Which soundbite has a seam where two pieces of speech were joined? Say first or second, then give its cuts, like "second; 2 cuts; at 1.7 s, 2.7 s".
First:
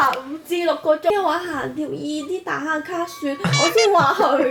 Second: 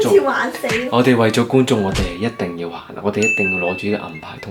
first; 1 cut; at 1.1 s